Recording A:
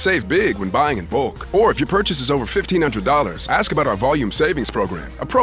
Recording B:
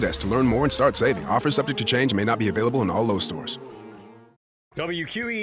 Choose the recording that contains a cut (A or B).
B